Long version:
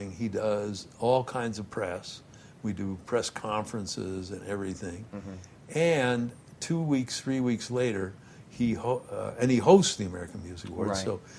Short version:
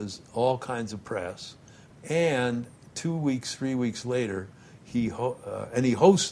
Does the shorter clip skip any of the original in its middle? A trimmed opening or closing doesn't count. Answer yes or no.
yes